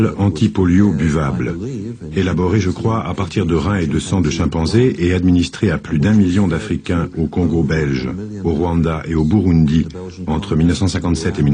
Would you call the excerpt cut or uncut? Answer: uncut